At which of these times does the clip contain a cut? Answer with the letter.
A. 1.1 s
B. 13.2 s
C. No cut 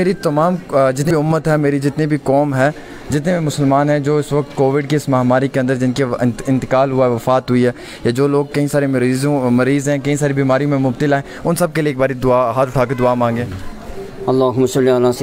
A